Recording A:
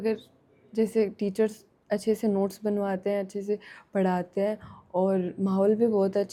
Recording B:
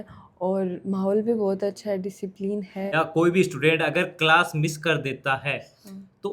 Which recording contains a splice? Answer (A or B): B